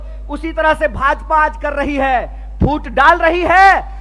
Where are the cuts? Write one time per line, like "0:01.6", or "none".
none